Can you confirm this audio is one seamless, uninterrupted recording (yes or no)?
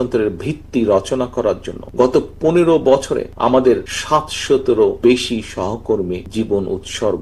no